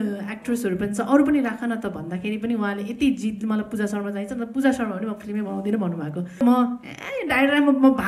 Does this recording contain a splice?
yes; 1 cut; at 6.4 s

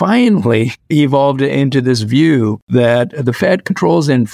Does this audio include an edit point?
yes; 1 cut; at 2.6 s

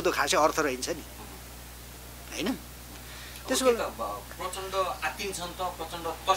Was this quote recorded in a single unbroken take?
yes; 0 cuts

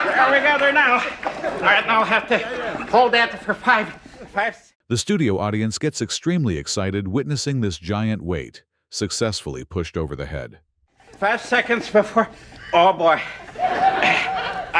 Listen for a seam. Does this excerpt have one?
no; 0 cuts

